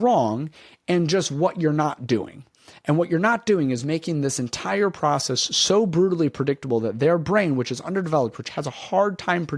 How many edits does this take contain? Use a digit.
0